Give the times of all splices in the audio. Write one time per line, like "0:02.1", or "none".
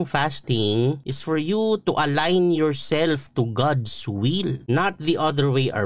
0:01.1
0:04.6